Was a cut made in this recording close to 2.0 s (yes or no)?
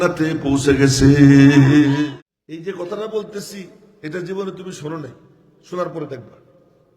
yes